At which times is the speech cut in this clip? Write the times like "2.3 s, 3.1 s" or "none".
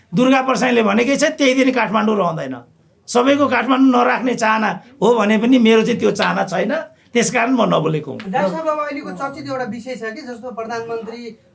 none